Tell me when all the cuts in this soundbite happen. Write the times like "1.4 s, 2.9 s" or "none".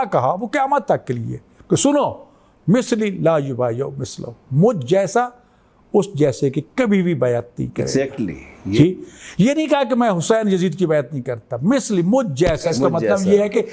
none